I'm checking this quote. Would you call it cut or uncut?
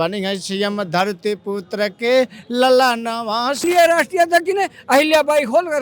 cut